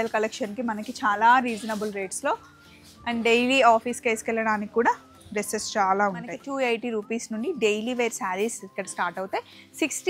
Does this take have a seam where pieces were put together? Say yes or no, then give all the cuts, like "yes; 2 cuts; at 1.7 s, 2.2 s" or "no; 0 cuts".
yes; 1 cut; at 6.4 s